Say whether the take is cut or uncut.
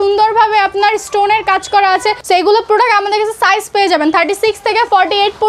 cut